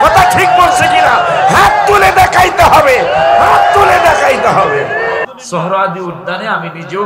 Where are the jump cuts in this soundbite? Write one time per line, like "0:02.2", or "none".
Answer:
0:05.2